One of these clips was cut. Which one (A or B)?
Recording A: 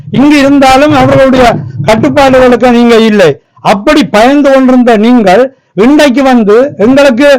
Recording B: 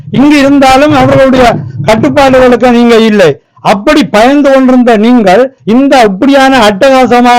B